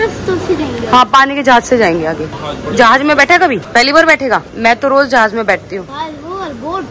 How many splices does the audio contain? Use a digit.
0